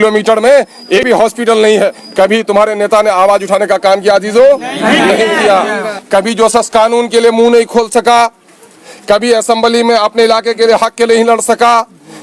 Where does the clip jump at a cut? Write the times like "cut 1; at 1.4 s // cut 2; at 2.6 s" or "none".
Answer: cut 1; at 1.0 s // cut 2; at 5.9 s